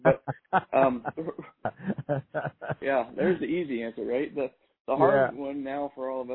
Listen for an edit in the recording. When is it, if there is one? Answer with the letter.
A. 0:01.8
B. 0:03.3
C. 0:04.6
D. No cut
A